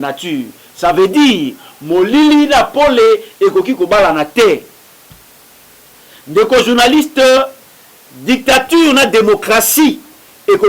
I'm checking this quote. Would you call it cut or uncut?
uncut